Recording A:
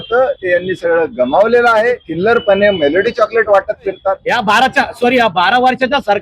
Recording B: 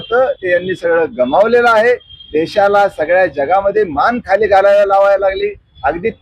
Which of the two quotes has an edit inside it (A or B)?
A